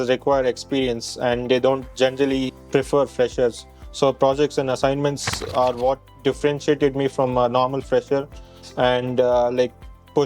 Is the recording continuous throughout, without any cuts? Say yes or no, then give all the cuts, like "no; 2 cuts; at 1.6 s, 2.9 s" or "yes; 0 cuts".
yes; 0 cuts